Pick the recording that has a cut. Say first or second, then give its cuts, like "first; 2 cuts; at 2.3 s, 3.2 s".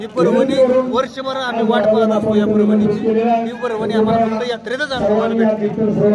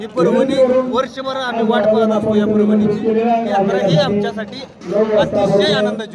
second; 1 cut; at 3.5 s